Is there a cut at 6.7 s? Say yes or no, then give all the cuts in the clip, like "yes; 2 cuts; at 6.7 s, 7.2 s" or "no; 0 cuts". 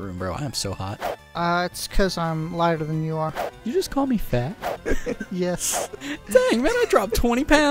no; 2 cuts; at 1.1 s, 3.5 s